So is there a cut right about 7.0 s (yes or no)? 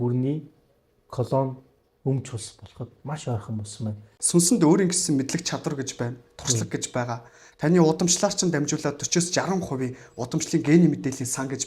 no